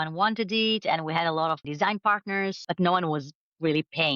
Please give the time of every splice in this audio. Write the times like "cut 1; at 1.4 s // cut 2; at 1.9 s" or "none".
cut 1; at 1.7 s // cut 2; at 2.6 s